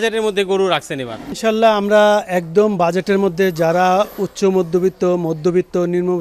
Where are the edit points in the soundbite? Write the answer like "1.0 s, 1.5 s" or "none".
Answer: none